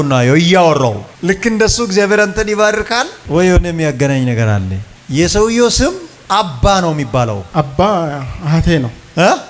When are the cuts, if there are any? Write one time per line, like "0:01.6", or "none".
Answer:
0:01.1